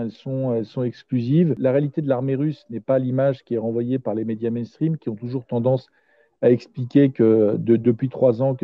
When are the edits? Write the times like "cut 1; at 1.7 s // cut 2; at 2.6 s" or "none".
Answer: cut 1; at 1.6 s